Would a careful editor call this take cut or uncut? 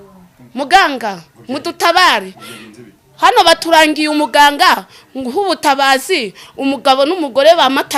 uncut